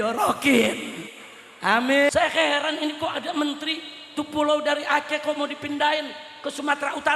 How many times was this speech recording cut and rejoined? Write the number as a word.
one